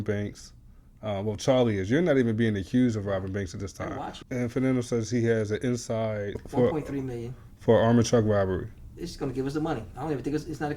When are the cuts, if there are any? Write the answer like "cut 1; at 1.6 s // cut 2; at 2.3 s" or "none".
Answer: cut 1; at 4.2 s // cut 2; at 6.4 s